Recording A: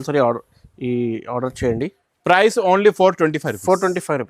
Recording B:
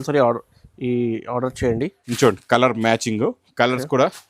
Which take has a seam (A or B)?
B